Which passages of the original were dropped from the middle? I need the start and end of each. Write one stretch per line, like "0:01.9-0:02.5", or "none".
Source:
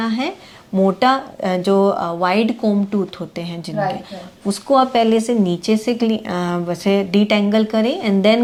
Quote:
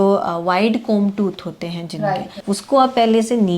0:04.1-0:04.3